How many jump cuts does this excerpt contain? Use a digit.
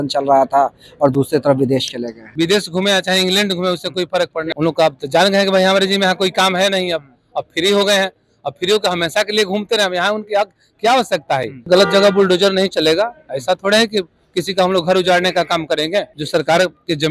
4